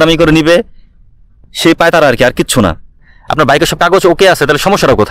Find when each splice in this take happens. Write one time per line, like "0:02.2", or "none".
0:03.2